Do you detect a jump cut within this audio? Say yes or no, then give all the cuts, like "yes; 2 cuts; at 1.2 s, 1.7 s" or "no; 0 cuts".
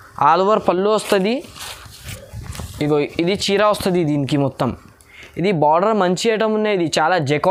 no; 0 cuts